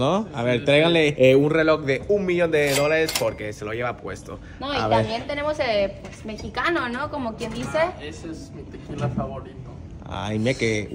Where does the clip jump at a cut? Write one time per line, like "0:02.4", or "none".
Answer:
none